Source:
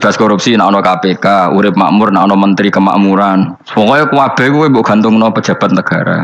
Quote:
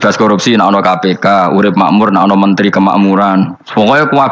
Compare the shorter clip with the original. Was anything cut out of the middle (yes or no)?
no